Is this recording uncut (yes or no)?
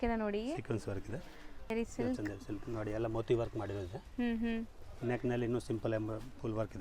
no